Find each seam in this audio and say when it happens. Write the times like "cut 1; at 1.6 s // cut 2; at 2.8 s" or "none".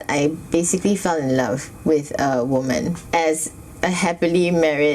cut 1; at 3.0 s